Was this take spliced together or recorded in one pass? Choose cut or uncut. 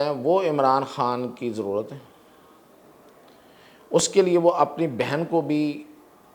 uncut